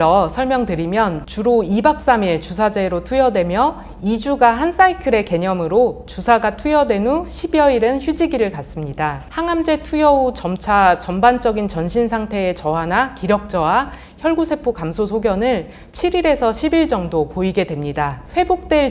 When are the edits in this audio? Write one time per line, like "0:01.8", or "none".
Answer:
0:01.2
0:09.2